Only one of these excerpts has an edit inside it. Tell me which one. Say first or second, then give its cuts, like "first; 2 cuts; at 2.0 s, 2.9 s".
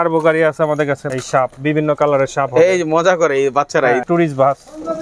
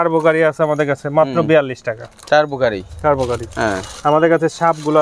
first; 2 cuts; at 1.1 s, 4.0 s